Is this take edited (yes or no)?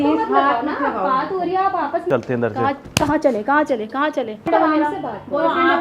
yes